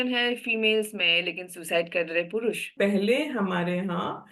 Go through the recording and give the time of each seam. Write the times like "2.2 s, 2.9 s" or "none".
2.7 s